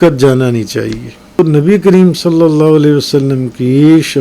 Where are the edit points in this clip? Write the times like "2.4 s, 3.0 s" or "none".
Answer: 1.4 s